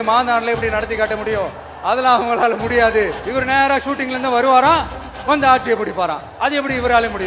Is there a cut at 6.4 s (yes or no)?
no